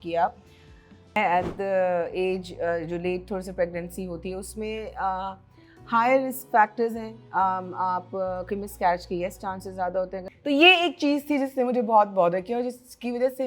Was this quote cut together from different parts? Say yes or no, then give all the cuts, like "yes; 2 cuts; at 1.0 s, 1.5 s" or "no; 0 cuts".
yes; 2 cuts; at 1.1 s, 10.2 s